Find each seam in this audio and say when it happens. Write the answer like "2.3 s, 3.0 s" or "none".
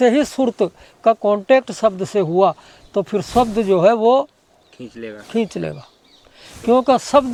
none